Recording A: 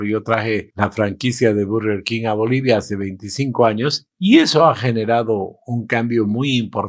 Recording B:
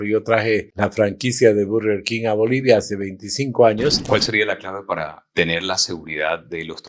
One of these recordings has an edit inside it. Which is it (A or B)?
B